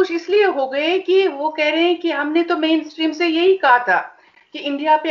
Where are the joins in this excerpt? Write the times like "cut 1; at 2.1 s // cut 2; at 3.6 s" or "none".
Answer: none